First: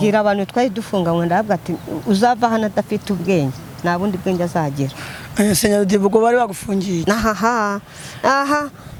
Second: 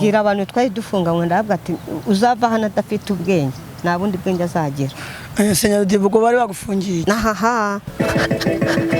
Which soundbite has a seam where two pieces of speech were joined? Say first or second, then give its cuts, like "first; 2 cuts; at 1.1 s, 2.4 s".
second; 1 cut; at 7.8 s